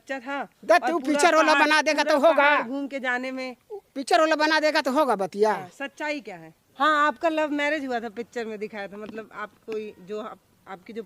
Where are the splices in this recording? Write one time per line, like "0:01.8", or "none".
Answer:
0:06.6